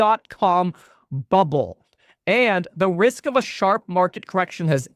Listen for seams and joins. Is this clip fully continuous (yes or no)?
yes